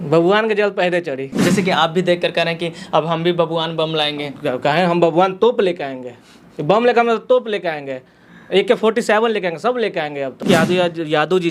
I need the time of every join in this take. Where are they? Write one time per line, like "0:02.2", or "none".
0:01.2
0:10.4